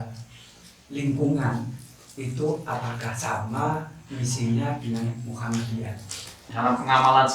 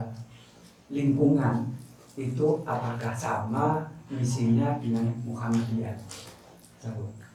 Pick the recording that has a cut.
first; 1 cut; at 6.4 s

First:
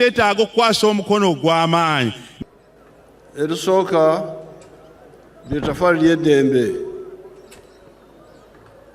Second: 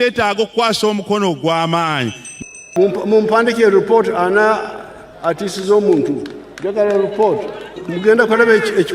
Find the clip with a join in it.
second; 2 cuts; at 2.7 s, 7.8 s

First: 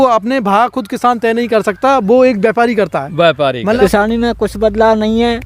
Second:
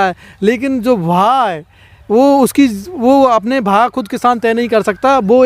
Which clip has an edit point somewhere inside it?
first; 1 cut; at 3.6 s

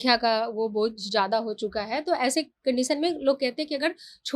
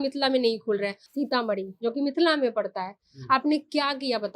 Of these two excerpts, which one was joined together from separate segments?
second; 1 cut; at 1.0 s

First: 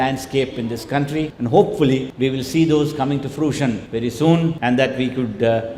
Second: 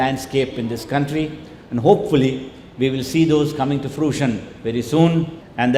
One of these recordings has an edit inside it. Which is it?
first; 4 cuts; at 1.3 s, 2.1 s, 3.9 s, 4.6 s

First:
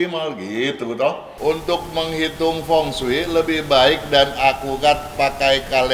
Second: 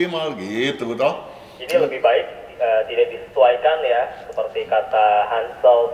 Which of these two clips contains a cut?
first; 1 cut; at 1.3 s

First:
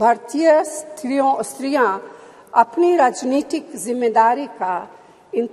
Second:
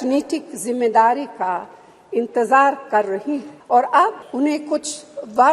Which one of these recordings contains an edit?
second; 2 cuts; at 3.5 s, 4.2 s

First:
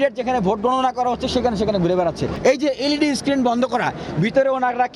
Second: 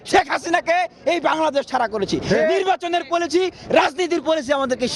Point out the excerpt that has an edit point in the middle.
first; 1 cut; at 2.3 s

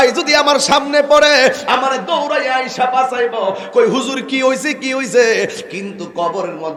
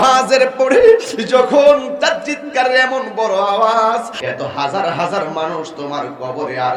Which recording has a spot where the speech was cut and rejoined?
second; 1 cut; at 4.2 s

